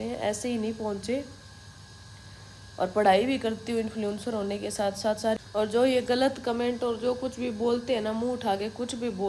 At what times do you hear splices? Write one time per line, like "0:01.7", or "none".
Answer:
0:05.4